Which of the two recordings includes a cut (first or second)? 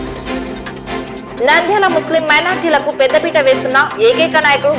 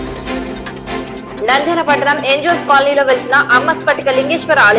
second